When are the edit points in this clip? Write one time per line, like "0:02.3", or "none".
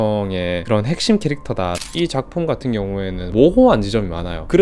0:01.9
0:03.3

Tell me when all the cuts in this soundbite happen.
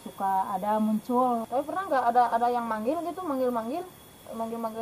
0:01.5

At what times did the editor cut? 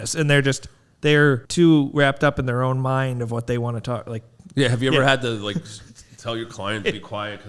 0:01.4

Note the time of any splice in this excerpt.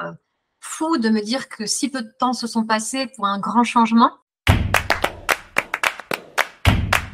0:04.3

